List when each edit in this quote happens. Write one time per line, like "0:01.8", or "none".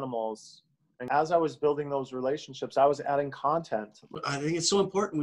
0:00.9
0:04.1